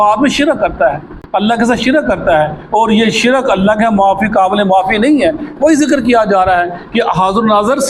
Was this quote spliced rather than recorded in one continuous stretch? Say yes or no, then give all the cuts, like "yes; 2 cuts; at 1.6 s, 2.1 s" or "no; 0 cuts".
no; 0 cuts